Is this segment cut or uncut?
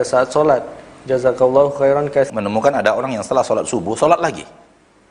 cut